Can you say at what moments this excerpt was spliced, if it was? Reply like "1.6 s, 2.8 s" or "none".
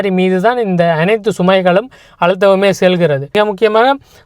3.3 s